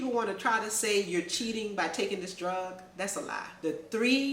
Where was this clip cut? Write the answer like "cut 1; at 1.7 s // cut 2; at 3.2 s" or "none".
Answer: cut 1; at 3.4 s